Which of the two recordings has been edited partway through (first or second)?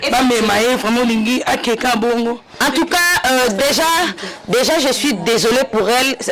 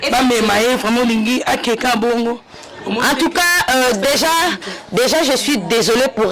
first